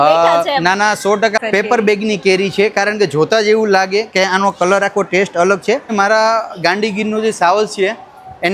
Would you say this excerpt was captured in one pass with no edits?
no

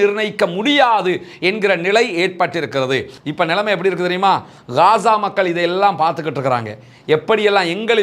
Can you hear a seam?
yes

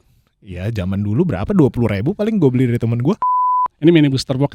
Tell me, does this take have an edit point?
yes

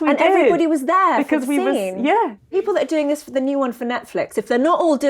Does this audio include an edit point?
yes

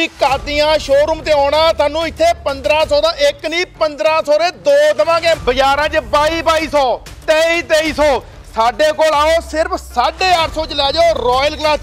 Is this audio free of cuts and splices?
no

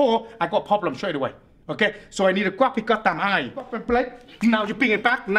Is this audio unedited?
no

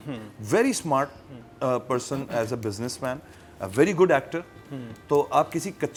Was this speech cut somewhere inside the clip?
no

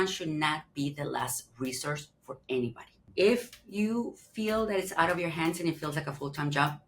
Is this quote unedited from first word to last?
no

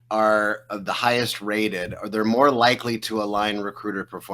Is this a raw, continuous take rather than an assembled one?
yes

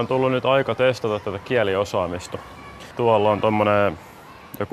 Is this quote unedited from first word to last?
no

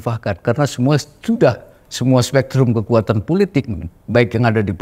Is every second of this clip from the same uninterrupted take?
yes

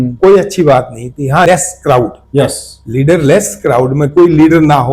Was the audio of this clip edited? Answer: yes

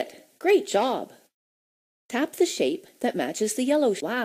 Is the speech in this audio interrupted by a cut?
no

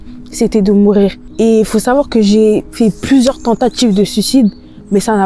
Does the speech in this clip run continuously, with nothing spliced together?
no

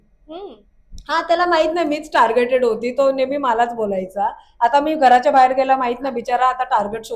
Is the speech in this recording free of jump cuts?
yes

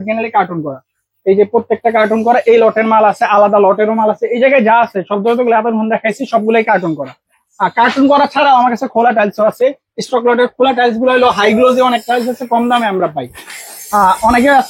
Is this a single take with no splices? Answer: yes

